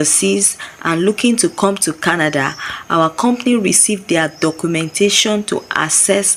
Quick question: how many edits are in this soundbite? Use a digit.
0